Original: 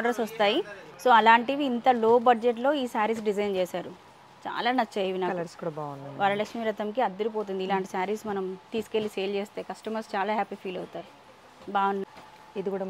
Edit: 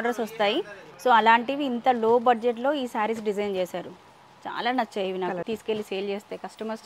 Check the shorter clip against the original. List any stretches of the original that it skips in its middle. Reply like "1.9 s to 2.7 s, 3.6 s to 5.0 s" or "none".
5.4 s to 8.7 s

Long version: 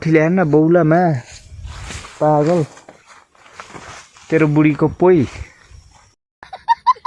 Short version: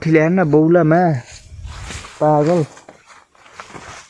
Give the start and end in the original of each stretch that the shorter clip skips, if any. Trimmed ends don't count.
none

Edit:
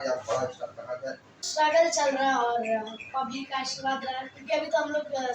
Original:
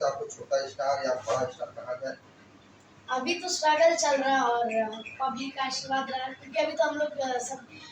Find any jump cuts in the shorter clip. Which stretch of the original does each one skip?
2.4 s to 3.5 s

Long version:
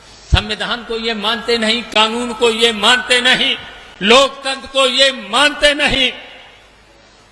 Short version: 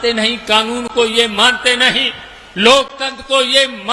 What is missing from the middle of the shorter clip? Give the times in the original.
none

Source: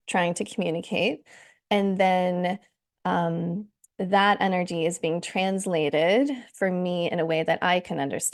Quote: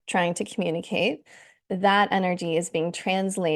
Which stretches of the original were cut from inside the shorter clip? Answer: 1.5 s to 3.8 s

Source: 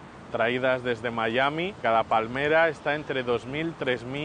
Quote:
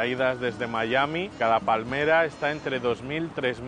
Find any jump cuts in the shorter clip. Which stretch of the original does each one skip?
none

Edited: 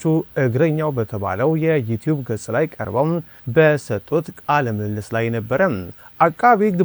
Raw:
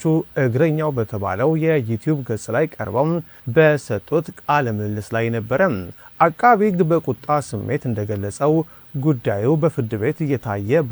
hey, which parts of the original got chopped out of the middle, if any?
none

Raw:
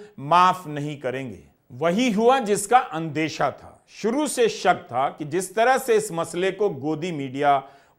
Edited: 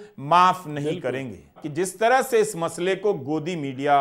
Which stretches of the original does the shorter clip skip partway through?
1.6 s to 5.2 s

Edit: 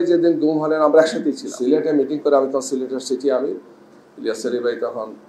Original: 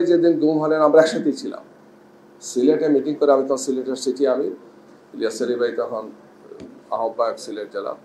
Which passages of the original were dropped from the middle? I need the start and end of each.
1.5 s to 2.4 s

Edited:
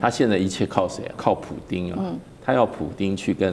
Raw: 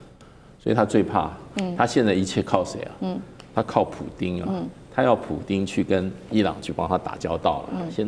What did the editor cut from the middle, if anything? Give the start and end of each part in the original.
3.0 s to 3.7 s

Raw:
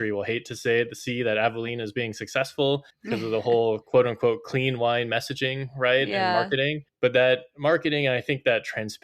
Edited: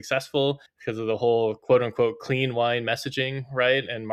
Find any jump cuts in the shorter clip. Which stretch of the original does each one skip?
none

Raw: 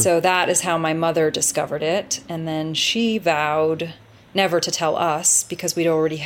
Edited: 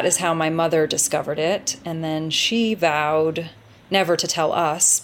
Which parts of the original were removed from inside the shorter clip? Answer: none

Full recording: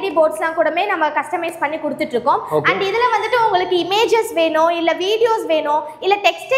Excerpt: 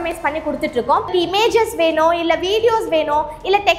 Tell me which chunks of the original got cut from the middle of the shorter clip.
2.5 s to 3.7 s

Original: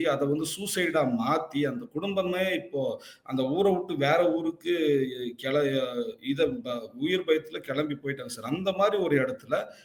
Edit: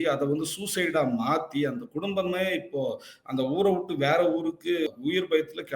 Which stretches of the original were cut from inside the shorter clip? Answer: 4.9 s to 6.8 s

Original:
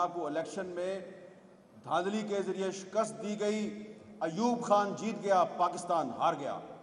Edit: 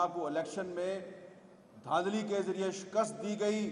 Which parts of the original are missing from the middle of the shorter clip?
none

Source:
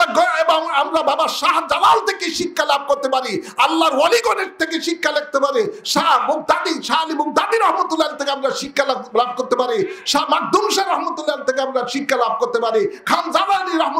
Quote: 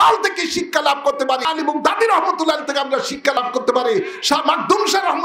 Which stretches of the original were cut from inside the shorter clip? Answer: 3.3 s to 7.0 s, 8.9 s to 9.2 s

